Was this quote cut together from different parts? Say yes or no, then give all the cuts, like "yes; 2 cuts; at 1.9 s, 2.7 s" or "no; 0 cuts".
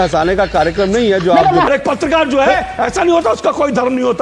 yes; 1 cut; at 1.7 s